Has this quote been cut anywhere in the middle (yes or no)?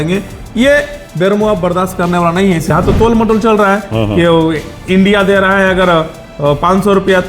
yes